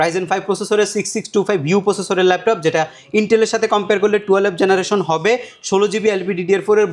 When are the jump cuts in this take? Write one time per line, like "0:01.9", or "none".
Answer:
none